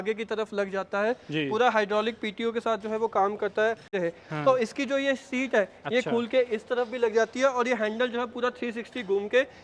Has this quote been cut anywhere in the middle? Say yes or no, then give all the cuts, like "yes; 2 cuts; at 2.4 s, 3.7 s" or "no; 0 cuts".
yes; 1 cut; at 3.9 s